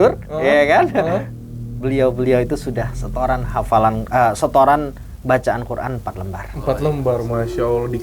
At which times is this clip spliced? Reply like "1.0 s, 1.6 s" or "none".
none